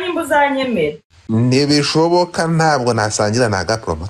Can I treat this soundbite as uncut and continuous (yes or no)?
no